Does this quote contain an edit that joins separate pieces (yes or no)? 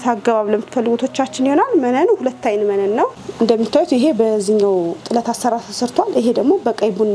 yes